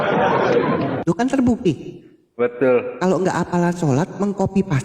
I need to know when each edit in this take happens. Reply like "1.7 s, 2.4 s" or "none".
0.9 s